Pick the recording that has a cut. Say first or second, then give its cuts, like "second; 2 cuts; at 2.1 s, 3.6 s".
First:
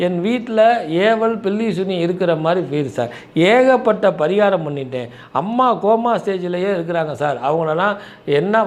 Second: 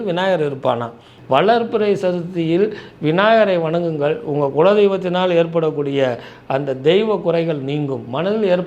second; 1 cut; at 1.1 s